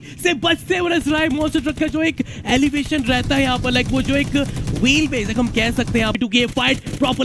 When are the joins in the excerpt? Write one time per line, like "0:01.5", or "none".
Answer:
none